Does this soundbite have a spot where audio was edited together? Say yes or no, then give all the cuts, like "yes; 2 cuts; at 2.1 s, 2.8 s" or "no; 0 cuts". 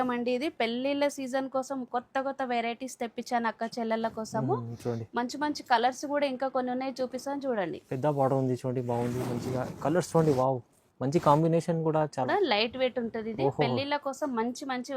yes; 1 cut; at 12.3 s